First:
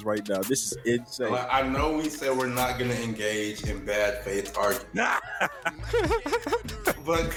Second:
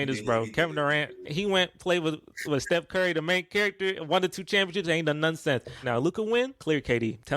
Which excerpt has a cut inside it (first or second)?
second